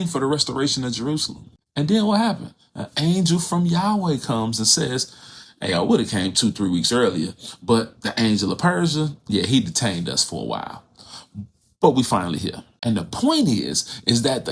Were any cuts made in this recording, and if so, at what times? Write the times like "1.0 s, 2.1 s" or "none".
none